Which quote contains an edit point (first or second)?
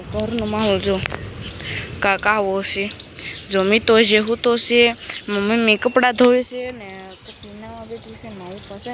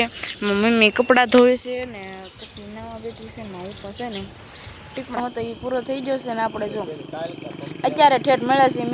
second